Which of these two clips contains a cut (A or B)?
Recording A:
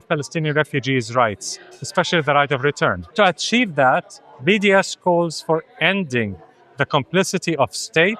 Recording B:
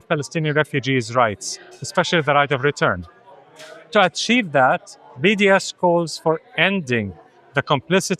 A